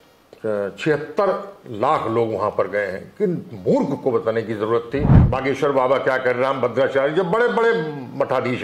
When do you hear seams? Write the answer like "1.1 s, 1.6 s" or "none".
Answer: 5.2 s